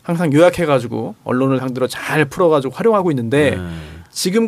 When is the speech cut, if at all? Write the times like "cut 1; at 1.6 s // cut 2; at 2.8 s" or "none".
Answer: cut 1; at 2.0 s